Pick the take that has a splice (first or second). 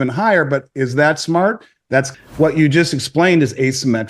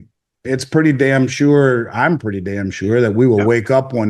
first